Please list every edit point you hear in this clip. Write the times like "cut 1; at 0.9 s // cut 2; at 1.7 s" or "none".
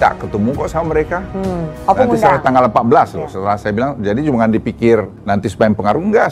cut 1; at 1.7 s // cut 2; at 5.2 s